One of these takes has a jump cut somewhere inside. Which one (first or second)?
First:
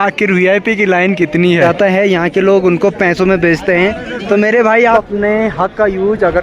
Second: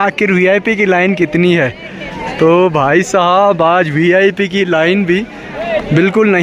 first